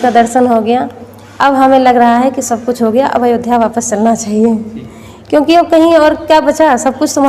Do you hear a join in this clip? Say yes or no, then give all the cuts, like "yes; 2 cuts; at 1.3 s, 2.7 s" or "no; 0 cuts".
no; 0 cuts